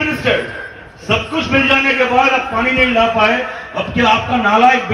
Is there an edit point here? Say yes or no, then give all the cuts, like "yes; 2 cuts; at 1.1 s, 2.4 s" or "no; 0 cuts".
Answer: no; 0 cuts